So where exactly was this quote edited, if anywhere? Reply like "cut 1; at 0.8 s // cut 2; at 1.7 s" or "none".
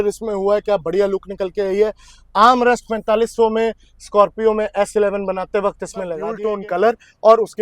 cut 1; at 6.4 s